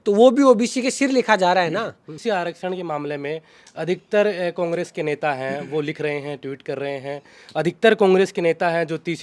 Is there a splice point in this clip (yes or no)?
yes